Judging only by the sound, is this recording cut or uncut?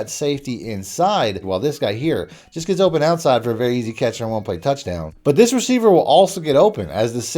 cut